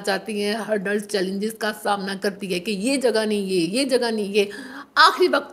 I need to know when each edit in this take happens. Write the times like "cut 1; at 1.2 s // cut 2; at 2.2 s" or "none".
none

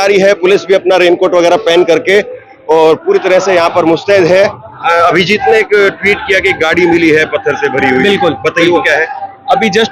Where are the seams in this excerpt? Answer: cut 1; at 4.7 s

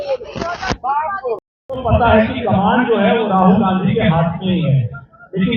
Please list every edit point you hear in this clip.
cut 1; at 1.5 s

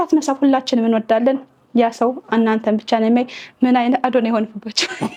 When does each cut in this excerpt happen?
none

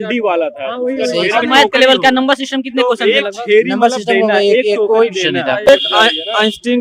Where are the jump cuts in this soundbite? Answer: cut 1; at 5.7 s

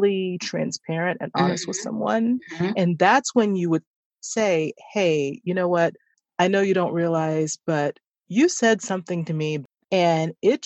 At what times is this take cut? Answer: cut 1; at 9.6 s

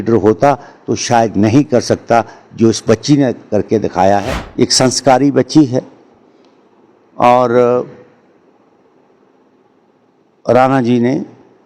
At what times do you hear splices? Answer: cut 1; at 4.4 s

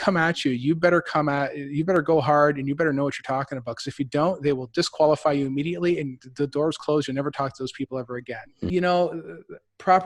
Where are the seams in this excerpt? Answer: cut 1; at 8.7 s

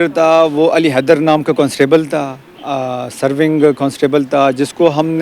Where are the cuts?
none

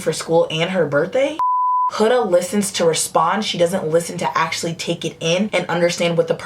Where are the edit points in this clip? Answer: cut 1; at 1.4 s

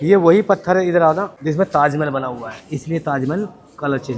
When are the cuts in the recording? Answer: cut 1; at 1.3 s

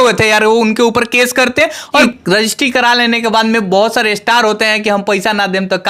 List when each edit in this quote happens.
cut 1; at 2.1 s

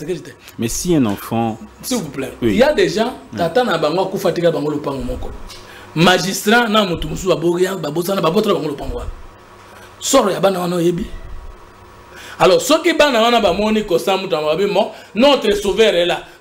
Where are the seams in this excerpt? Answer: none

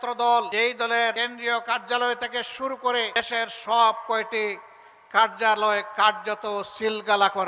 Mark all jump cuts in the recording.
cut 1; at 1.0 s // cut 2; at 3.2 s

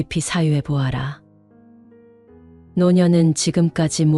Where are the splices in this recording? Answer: cut 1; at 1.2 s // cut 2; at 2.7 s

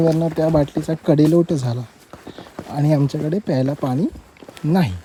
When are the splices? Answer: none

